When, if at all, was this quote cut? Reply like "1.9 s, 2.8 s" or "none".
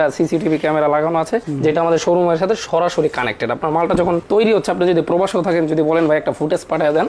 none